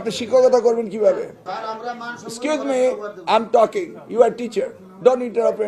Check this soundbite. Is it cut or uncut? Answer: cut